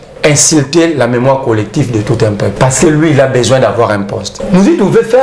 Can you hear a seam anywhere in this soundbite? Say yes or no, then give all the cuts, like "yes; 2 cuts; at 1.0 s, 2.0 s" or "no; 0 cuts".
yes; 2 cuts; at 2.5 s, 4.3 s